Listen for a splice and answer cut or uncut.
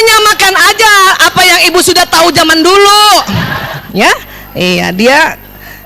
cut